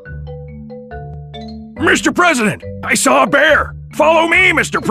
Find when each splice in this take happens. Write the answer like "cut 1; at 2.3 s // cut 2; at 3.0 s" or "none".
none